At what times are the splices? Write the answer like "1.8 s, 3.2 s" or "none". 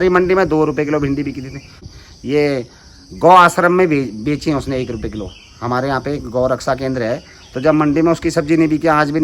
1.9 s